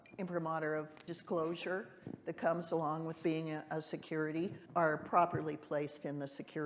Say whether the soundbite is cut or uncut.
cut